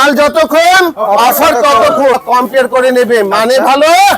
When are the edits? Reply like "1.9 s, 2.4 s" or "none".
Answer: 2.1 s